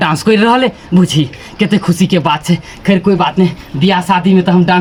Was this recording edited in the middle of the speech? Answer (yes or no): no